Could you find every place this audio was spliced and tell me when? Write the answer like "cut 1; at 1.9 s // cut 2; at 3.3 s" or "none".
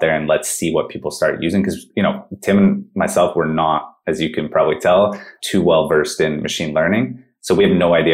none